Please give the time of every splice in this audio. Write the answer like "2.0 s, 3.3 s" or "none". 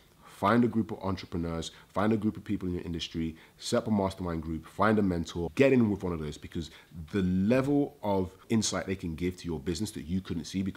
5.5 s